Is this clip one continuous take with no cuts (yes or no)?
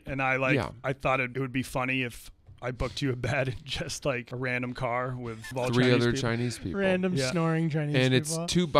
no